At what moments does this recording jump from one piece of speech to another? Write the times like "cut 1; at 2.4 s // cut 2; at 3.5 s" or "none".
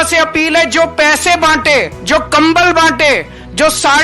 cut 1; at 2.0 s